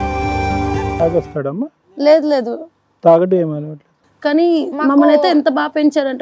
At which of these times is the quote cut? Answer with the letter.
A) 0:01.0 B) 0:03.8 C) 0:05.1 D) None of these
A